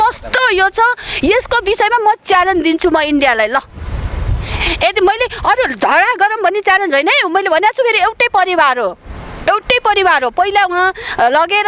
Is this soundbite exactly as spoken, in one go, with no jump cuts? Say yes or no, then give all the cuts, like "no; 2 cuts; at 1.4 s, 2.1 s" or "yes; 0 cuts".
yes; 0 cuts